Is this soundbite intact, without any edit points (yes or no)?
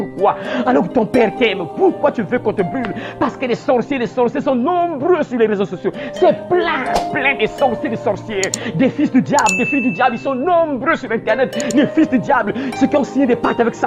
yes